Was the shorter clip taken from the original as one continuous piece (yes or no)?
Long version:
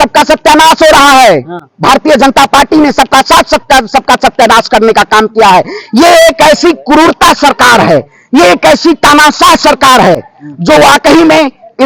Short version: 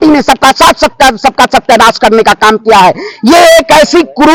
yes